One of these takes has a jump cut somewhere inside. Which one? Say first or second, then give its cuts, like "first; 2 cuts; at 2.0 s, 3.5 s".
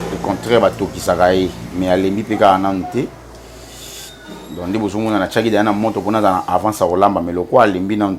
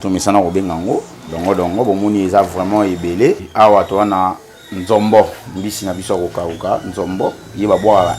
second; 1 cut; at 3.4 s